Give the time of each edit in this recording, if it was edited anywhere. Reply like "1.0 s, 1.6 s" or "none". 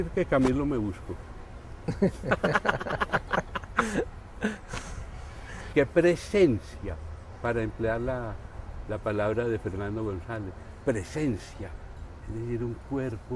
5.7 s